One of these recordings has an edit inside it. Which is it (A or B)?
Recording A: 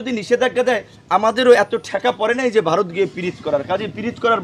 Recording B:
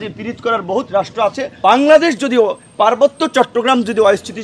B